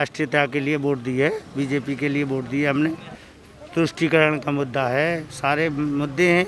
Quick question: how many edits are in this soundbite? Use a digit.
1